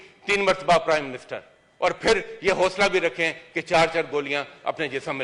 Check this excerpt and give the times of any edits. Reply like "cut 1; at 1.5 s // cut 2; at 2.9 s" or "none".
none